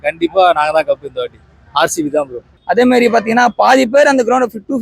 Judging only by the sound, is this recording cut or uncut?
cut